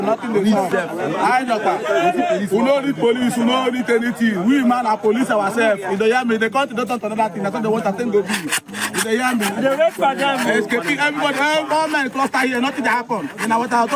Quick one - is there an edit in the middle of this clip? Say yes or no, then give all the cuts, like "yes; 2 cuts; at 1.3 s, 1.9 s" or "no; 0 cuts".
no; 0 cuts